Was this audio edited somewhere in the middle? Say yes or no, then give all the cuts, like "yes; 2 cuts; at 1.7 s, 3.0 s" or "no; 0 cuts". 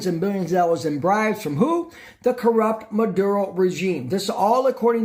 no; 0 cuts